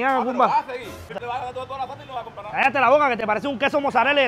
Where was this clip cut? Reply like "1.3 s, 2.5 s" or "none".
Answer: 1.2 s